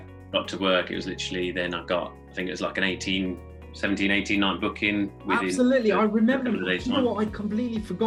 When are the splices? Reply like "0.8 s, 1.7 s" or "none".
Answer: none